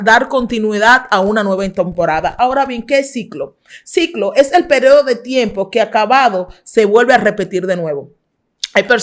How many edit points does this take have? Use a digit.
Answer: 0